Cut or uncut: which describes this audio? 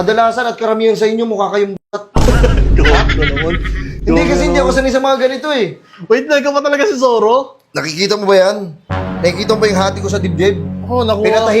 uncut